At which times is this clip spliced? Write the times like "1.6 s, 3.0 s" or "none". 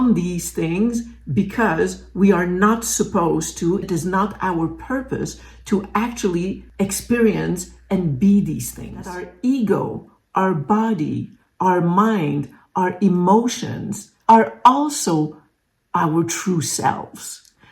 3.8 s, 9.3 s